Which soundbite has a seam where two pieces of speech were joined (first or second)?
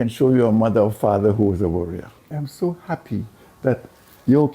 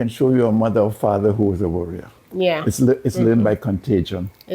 first